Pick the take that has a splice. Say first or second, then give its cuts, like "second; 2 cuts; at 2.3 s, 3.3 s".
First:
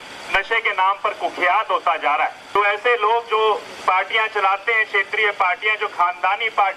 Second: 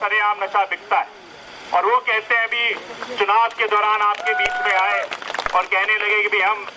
first; 1 cut; at 2.4 s